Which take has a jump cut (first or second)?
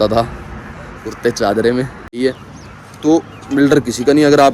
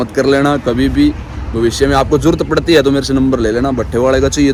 first